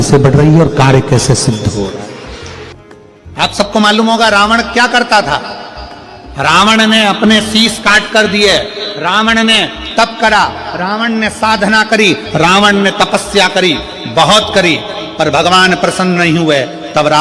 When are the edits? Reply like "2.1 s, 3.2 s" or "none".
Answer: 2.7 s